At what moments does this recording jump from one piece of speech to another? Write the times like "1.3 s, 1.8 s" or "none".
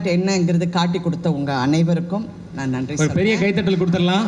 none